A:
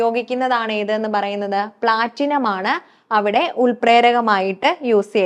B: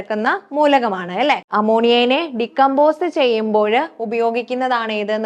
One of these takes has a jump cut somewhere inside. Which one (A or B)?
B